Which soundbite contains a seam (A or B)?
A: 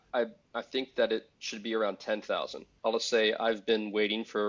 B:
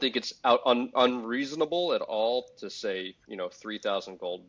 A